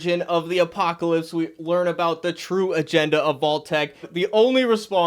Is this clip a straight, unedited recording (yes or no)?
no